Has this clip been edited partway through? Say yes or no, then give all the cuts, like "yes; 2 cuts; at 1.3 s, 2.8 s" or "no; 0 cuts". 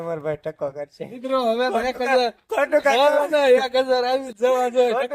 yes; 1 cut; at 1.2 s